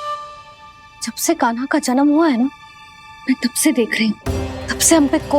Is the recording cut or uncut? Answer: cut